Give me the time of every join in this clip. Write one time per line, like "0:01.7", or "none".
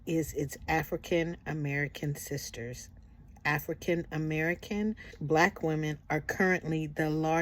0:05.1